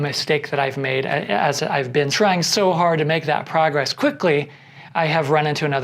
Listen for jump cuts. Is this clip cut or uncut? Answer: cut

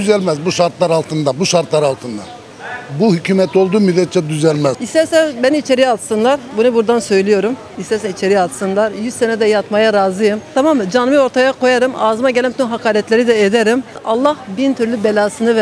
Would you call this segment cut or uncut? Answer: cut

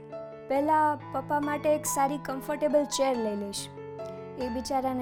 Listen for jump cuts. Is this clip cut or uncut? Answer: uncut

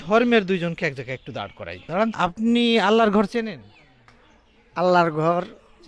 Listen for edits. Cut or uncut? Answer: cut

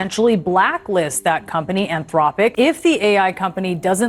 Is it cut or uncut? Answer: cut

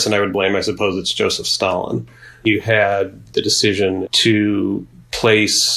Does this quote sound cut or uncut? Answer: uncut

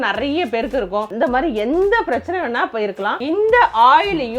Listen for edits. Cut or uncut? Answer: cut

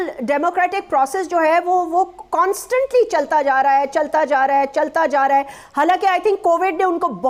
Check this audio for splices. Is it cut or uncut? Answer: uncut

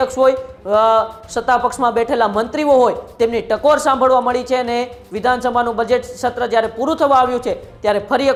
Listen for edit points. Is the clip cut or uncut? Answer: uncut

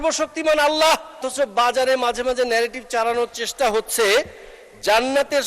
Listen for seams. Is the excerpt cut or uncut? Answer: cut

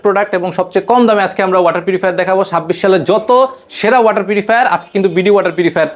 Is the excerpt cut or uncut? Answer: uncut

